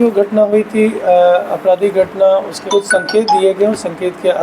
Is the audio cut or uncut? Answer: cut